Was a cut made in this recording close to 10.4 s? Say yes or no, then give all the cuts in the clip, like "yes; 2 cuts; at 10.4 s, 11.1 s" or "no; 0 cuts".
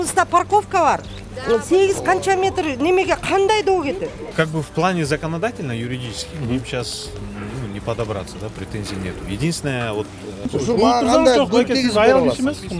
yes; 2 cuts; at 4.2 s, 10.4 s